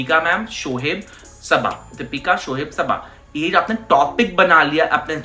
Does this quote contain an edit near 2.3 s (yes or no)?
no